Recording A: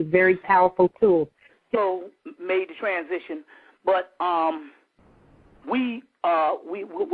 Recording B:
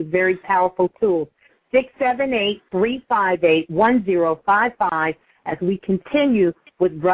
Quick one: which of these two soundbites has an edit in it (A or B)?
B